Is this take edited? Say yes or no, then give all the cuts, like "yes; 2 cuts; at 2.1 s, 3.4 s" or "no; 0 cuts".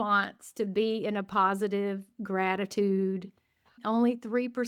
no; 0 cuts